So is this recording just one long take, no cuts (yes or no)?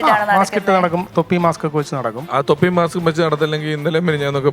no